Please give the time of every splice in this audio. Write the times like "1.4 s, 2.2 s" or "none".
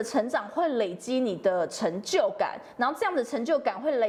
none